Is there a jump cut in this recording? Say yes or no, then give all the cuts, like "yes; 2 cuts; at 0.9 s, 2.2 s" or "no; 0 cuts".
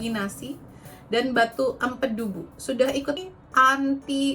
yes; 1 cut; at 3.2 s